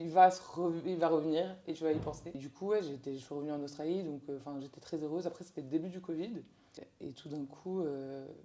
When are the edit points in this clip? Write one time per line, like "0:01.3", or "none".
0:02.5
0:06.9